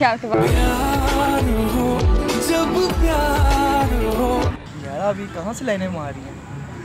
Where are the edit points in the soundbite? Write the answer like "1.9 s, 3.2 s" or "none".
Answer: none